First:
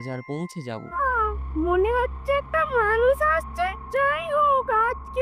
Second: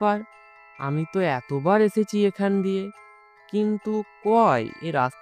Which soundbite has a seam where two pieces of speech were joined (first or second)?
first